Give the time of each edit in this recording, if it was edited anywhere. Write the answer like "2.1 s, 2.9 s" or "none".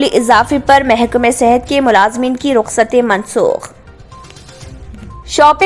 none